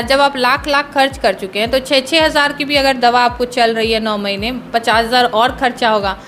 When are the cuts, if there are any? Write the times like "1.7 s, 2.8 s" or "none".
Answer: none